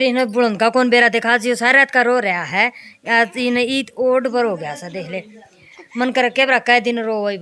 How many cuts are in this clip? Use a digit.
0